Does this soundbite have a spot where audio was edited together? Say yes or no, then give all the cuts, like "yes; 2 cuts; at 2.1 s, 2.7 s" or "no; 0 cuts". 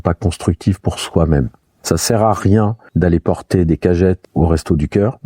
yes; 3 cuts; at 1.8 s, 2.8 s, 4.2 s